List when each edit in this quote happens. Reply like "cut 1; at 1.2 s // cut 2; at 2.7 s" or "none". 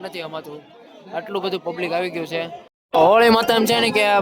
cut 1; at 2.8 s